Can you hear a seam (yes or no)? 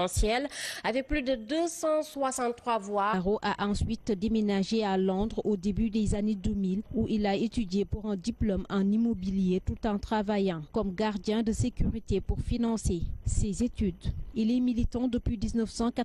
no